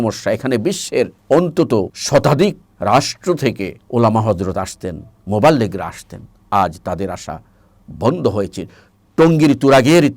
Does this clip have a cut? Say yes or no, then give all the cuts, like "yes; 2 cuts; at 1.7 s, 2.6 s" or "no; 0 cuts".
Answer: yes; 4 cuts; at 1.2 s, 2.0 s, 2.7 s, 3.8 s